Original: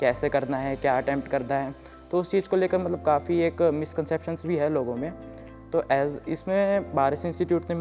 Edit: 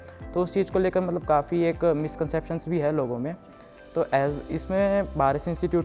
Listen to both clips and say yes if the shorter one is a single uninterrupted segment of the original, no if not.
yes